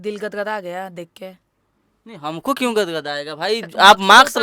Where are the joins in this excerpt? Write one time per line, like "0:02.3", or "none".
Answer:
none